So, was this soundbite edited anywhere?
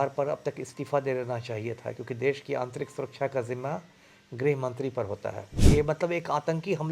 yes; 1 cut; at 5.5 s

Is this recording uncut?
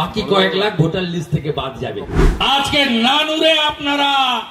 no; 1 cut; at 2.2 s

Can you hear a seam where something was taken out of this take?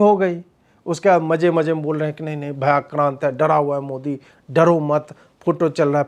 no; 0 cuts

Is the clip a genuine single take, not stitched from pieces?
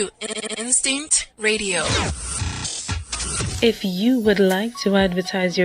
no; 1 cut; at 3.5 s

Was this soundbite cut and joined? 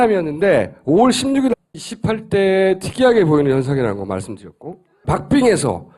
no; 0 cuts

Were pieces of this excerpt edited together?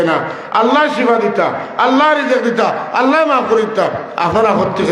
no; 0 cuts

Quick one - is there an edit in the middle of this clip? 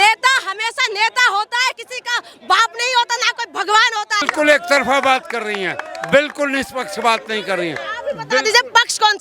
yes; 1 cut; at 4.3 s

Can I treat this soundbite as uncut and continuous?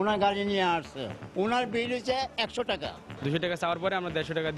no; 1 cut; at 3.1 s

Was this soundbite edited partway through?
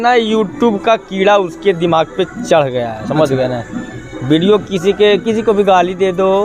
no; 0 cuts

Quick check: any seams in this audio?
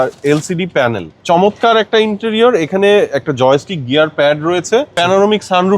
yes; 2 cuts; at 1.1 s, 4.9 s

